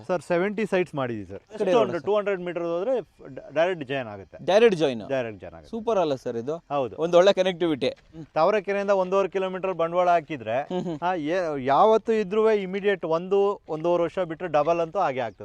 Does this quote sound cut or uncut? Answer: cut